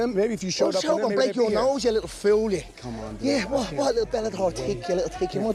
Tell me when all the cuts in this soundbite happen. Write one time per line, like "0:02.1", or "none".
none